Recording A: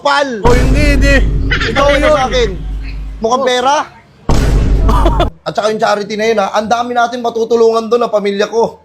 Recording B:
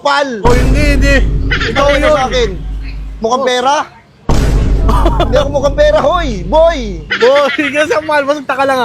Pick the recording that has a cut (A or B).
A